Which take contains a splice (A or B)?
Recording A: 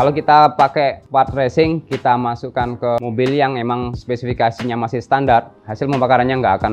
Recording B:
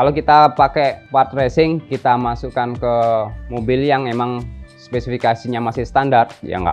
A